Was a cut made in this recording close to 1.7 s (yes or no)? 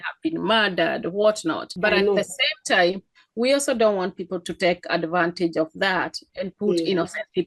yes